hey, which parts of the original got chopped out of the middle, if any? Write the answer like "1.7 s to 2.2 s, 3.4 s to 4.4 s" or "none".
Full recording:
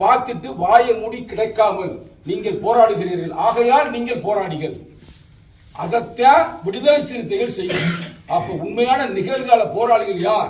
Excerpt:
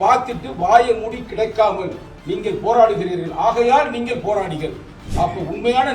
5.0 s to 8.1 s